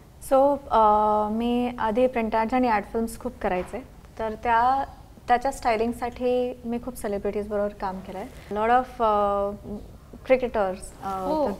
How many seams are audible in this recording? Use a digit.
1